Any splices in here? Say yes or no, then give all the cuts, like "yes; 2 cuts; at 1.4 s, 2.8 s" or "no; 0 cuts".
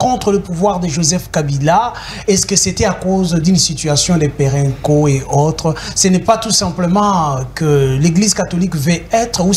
no; 0 cuts